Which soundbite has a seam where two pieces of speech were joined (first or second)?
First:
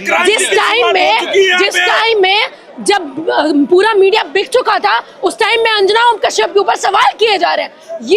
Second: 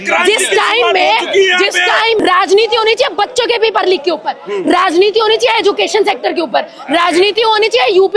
second